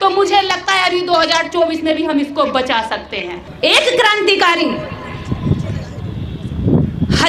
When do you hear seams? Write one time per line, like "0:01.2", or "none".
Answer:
0:03.4

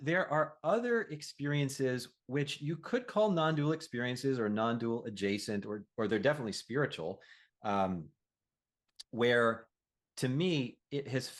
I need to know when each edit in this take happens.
none

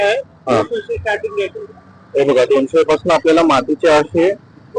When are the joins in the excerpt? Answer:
none

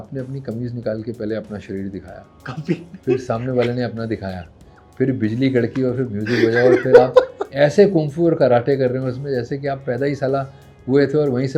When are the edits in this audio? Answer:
none

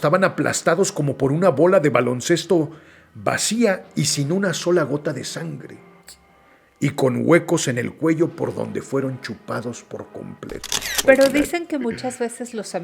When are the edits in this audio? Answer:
0:11.0

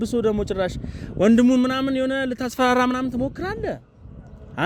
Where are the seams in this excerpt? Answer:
none

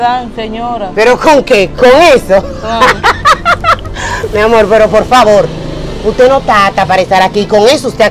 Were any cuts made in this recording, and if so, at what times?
none

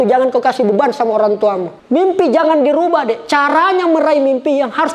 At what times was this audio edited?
0:01.7

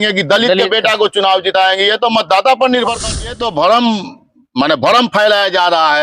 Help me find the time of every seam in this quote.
0:03.2

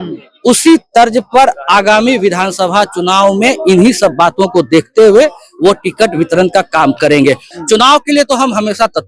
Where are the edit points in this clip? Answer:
0:07.5

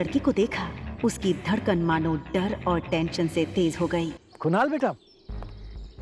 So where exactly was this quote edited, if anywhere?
0:04.2

